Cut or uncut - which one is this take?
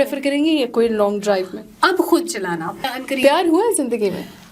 cut